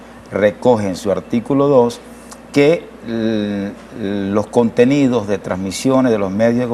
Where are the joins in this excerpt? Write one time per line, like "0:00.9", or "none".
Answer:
none